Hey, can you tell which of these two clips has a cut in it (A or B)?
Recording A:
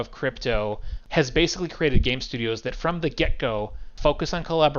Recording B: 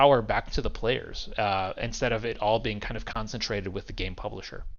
A